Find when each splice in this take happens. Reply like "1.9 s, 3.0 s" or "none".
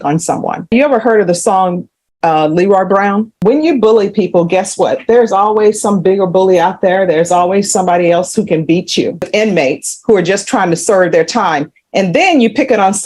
0.7 s, 3.3 s, 9.3 s